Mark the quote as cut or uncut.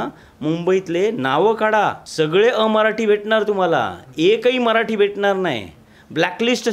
cut